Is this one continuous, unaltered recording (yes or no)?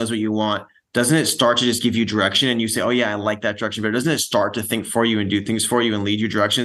yes